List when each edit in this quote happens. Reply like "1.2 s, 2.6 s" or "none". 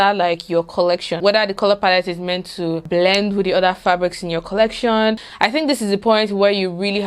1.1 s, 2.8 s, 5.3 s